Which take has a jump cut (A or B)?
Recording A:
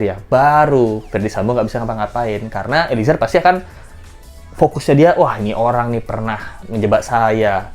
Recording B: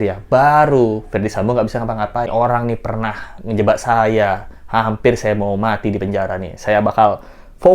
B